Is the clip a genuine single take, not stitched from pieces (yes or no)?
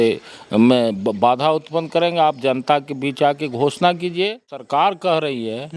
no